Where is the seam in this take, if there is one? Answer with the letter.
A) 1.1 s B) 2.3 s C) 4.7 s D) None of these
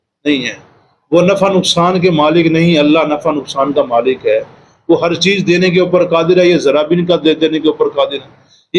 D